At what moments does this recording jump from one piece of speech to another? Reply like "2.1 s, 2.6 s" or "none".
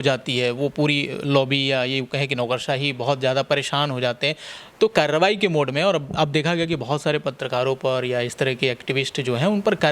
none